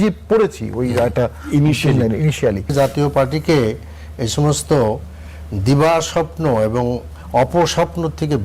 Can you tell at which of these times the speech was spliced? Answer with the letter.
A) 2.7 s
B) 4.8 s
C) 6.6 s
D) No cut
A